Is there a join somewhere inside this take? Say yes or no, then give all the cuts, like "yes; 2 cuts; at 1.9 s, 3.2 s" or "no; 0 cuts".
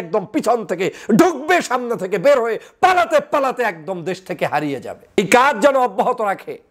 yes; 1 cut; at 5.2 s